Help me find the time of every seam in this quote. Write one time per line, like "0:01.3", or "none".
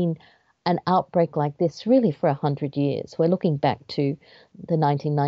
none